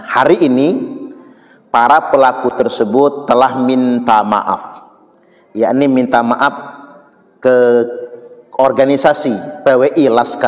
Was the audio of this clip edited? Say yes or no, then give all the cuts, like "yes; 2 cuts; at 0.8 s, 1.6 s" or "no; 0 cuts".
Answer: no; 0 cuts